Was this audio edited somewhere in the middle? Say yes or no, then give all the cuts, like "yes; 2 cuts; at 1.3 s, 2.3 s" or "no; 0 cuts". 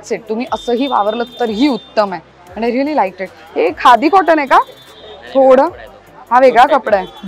no; 0 cuts